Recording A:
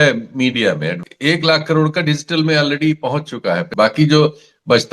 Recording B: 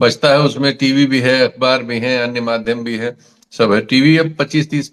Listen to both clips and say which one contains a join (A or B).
A